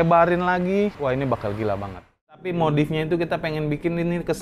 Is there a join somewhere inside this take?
yes; 1 cut; at 2.5 s

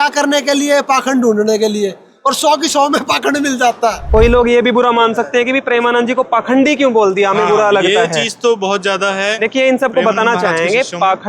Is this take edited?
yes; 1 cut; at 4.0 s

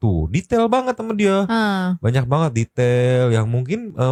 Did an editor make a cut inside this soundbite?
no; 0 cuts

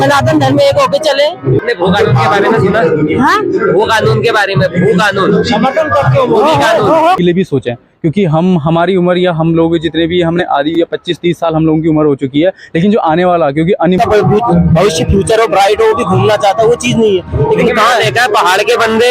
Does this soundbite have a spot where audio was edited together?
yes; 3 cuts; at 1.6 s, 7.2 s, 14.0 s

